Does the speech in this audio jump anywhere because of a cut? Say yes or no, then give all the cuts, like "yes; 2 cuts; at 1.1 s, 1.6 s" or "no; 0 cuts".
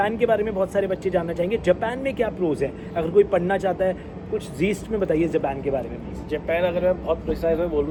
no; 0 cuts